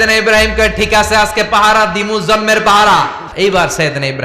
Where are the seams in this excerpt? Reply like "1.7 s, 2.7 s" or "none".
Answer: 3.2 s